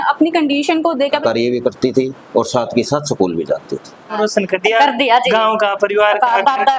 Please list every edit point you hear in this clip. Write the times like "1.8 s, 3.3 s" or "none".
1.1 s, 4.1 s